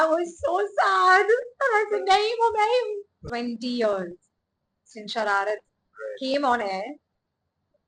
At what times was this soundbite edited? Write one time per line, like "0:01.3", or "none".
0:03.1